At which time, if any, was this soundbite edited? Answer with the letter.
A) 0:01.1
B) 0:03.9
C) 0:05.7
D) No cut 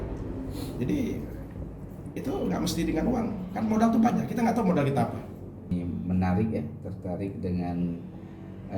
C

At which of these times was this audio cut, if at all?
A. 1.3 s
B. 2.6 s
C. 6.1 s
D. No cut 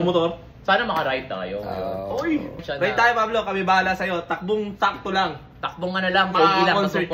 B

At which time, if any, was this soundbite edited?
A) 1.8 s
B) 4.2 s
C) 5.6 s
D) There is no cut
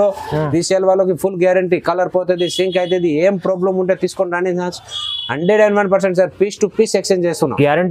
D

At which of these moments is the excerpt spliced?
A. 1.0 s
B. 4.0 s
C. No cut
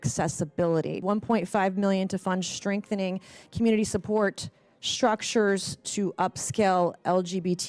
A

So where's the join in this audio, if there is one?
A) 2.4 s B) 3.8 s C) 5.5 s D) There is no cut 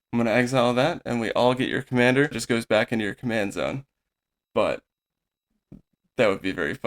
A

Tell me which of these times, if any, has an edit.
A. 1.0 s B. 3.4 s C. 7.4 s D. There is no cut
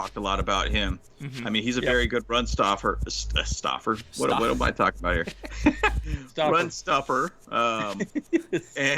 D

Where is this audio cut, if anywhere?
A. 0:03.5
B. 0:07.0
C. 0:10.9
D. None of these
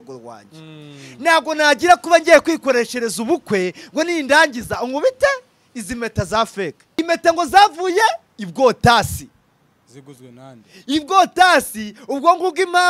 B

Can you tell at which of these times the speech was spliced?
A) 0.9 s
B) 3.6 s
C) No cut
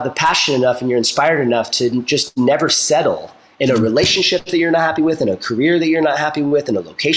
C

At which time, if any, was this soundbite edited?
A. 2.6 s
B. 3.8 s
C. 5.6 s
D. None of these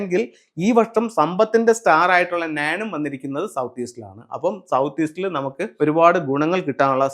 C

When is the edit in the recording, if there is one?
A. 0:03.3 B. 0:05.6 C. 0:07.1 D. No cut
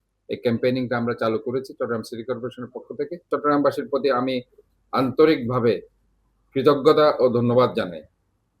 A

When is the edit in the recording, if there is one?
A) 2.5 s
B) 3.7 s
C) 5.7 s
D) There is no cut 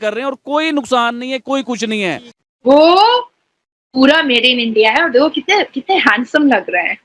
A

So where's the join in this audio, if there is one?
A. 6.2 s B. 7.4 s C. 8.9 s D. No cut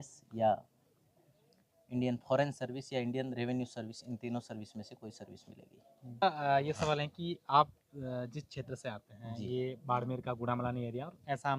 A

